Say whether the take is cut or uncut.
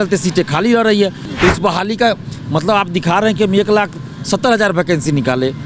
cut